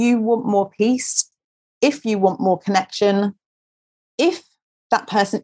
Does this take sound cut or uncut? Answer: uncut